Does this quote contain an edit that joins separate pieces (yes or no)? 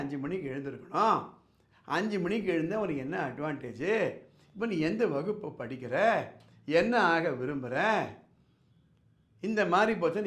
no